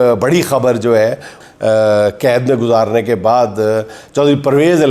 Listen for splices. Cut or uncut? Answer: cut